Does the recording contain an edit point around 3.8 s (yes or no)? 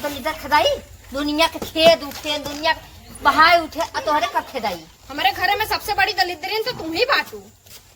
no